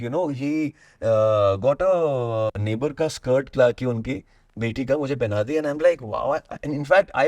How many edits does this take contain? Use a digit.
1